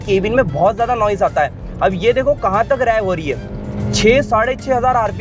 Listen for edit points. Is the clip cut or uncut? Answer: uncut